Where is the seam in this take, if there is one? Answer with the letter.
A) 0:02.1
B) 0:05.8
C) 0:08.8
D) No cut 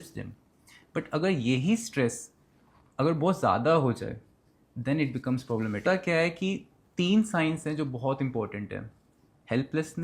B